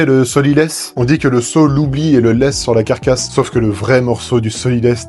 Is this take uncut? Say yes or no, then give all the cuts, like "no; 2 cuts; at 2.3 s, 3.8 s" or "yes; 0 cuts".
no; 2 cuts; at 0.9 s, 3.2 s